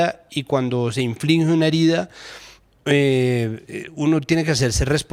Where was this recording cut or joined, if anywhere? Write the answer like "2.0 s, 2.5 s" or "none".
none

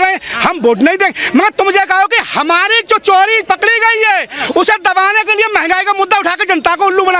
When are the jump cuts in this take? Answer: none

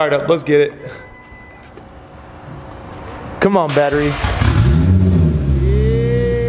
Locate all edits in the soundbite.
none

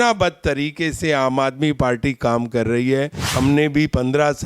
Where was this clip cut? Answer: 3.2 s

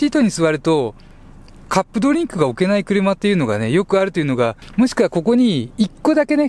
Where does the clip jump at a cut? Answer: 4.6 s

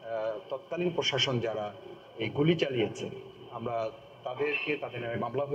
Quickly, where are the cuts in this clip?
none

